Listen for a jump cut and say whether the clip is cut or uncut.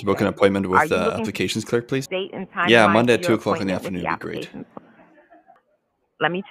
cut